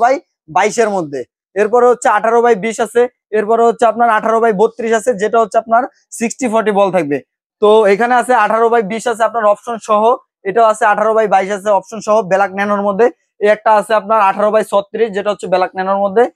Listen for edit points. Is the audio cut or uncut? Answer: uncut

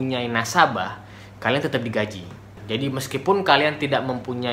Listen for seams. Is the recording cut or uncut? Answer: cut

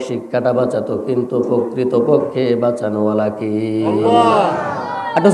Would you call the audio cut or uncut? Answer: uncut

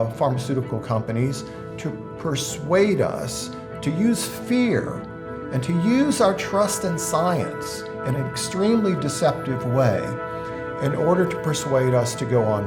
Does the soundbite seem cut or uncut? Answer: uncut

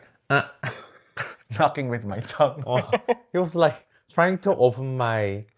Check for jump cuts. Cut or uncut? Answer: uncut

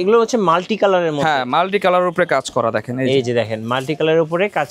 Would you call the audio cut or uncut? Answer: uncut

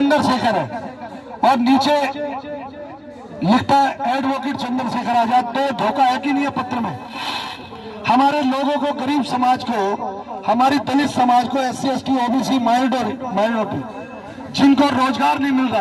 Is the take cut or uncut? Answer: uncut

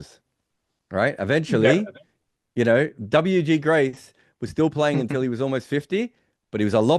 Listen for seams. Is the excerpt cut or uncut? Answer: uncut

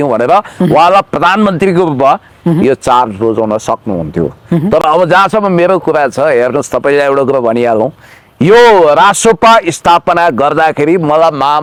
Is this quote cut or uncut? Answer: uncut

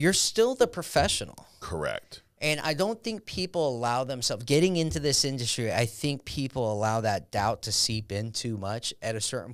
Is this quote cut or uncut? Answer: uncut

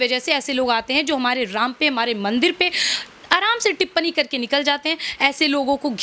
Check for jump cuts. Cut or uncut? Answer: uncut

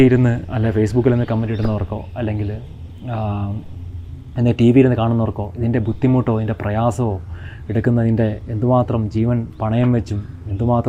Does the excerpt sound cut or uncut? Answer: uncut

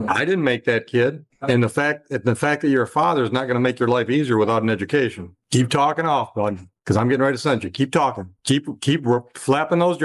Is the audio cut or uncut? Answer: uncut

